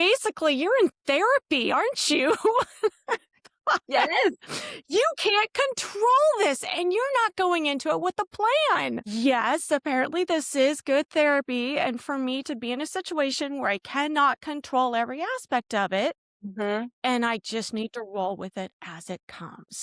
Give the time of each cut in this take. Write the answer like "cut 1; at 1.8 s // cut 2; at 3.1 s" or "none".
none